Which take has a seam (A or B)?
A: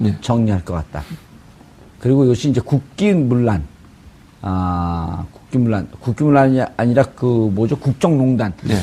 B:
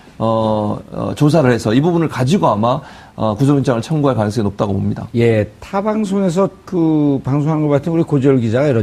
B